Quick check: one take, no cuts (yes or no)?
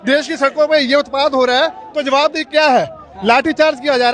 yes